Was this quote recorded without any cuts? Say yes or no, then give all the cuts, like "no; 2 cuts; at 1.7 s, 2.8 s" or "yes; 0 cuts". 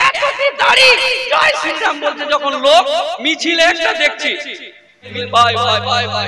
no; 1 cut; at 5.1 s